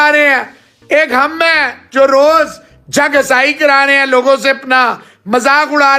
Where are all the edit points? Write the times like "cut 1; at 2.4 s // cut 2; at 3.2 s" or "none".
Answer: none